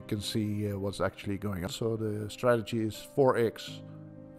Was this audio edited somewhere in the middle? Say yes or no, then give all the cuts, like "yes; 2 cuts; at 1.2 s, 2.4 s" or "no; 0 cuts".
yes; 1 cut; at 1.7 s